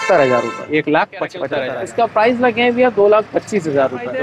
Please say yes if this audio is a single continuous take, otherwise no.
no